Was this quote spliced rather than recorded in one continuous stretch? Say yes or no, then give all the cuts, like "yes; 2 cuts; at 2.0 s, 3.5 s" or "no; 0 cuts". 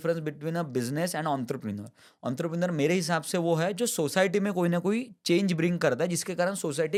no; 0 cuts